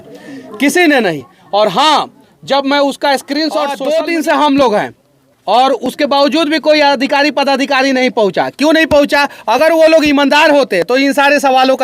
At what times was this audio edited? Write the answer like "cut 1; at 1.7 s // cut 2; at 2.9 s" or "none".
cut 1; at 3.8 s